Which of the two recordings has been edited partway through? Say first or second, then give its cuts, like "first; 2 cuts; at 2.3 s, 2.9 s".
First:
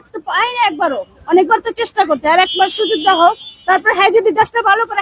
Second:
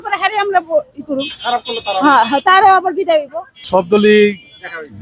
second; 1 cut; at 3.7 s